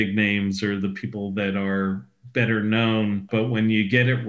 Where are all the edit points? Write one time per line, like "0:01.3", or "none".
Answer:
0:03.3